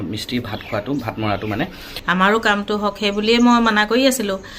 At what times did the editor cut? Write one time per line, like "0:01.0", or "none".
0:01.9